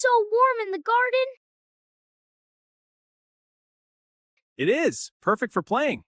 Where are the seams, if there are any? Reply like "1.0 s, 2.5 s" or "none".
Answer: none